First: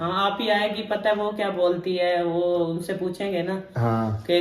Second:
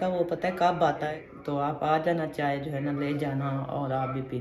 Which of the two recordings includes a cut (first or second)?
second